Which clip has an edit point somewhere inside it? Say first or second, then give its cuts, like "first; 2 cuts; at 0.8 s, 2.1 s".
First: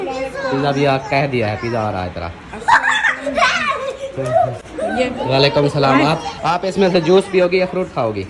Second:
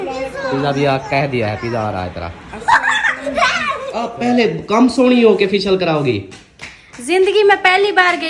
second; 1 cut; at 4.0 s